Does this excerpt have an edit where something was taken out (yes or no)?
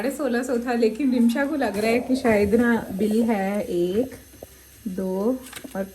no